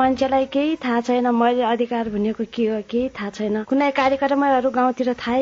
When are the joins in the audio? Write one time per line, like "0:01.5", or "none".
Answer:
none